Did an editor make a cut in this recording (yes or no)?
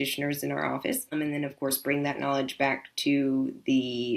yes